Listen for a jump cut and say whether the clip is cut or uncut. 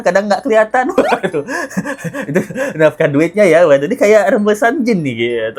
uncut